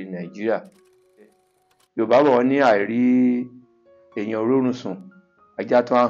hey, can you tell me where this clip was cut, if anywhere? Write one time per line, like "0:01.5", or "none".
0:01.4

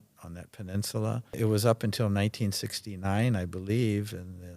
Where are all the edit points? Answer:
0:01.3

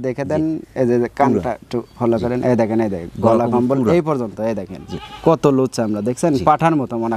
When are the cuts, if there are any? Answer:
none

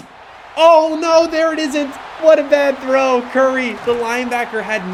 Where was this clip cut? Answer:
none

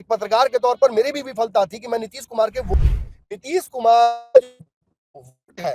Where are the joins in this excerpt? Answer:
0:02.7

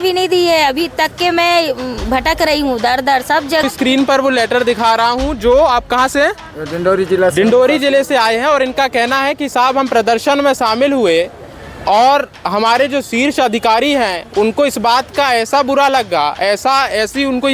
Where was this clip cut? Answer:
0:03.6

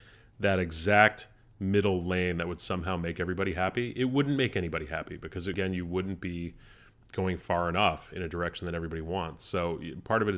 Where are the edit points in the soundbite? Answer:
0:05.5

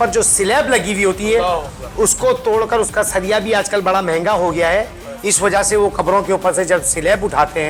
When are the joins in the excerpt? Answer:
none

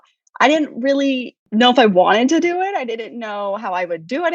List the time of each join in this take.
0:01.4

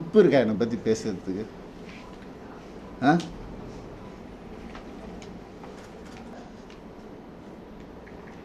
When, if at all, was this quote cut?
0:06.3

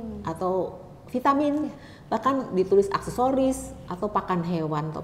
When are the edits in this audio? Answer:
none

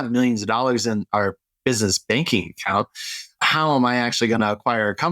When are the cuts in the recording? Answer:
0:03.4

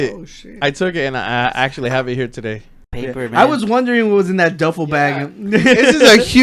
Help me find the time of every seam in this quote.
0:02.9

